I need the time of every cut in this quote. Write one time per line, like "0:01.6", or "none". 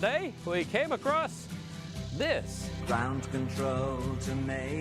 none